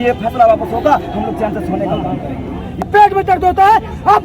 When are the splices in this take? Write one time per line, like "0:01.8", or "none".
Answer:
0:02.8